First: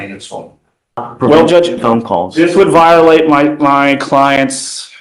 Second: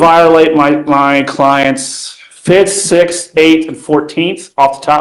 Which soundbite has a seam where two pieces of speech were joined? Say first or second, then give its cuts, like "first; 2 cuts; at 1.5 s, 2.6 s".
first; 1 cut; at 1.1 s